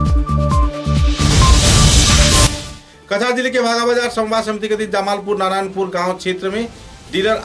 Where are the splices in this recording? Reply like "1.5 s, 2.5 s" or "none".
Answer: 2.6 s